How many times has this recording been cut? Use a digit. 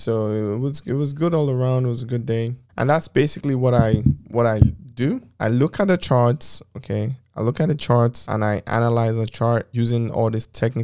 1